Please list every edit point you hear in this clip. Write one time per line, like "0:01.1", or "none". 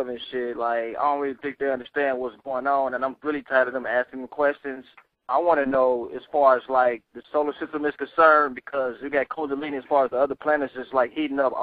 0:09.1